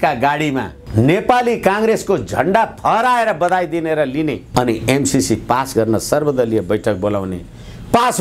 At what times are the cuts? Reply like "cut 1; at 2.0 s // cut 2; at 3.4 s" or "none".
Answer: none